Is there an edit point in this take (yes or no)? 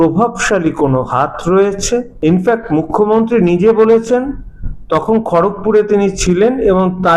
yes